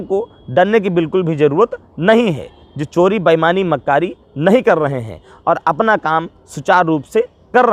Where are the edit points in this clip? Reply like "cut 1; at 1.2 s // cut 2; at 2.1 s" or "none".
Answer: none